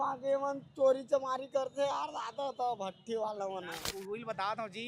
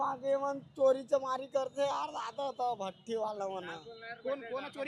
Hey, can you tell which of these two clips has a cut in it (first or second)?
first